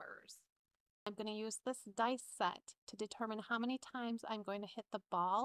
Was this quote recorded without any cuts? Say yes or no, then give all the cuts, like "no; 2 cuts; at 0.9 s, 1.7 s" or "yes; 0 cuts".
no; 1 cut; at 1.1 s